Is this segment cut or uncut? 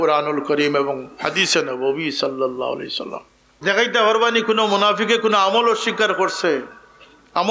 cut